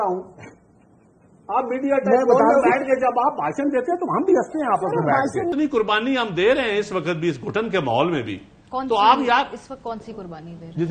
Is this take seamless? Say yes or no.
no